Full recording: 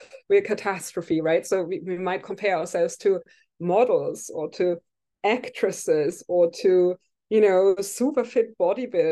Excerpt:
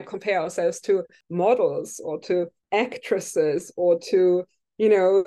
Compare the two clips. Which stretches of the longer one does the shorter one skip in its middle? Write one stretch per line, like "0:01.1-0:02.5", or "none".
0:03.3-0:03.5
0:04.9-0:05.1